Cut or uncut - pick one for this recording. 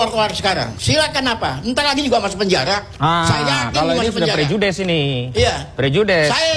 uncut